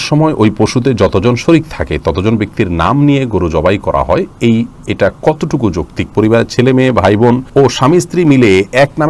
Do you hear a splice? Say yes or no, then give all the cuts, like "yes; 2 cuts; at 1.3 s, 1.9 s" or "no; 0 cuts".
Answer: yes; 2 cuts; at 6.1 s, 7.4 s